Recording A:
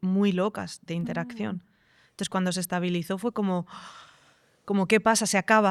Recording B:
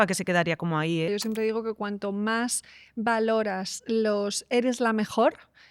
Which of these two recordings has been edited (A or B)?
B